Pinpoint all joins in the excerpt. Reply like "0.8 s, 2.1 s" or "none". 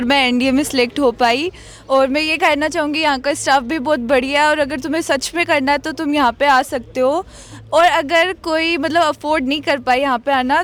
none